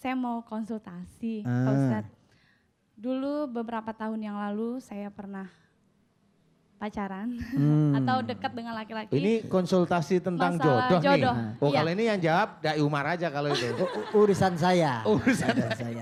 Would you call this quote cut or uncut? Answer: uncut